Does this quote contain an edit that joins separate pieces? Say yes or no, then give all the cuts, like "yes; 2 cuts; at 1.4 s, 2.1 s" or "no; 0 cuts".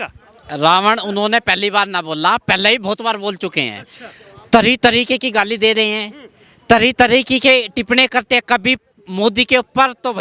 no; 0 cuts